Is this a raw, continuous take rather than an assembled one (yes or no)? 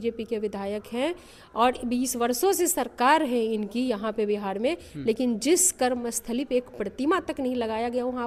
yes